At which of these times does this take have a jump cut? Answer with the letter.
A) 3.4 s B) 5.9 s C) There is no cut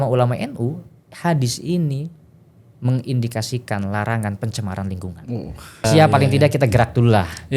B